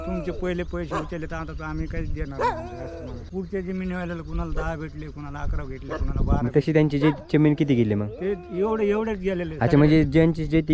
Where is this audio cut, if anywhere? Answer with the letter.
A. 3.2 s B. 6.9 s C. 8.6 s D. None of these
A